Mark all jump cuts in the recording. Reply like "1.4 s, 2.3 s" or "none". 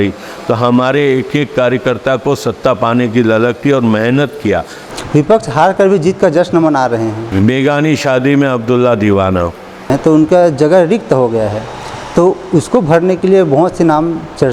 4.8 s, 7.2 s, 9.9 s